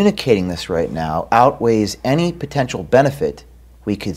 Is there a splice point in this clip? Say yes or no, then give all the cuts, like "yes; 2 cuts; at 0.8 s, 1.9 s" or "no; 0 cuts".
no; 0 cuts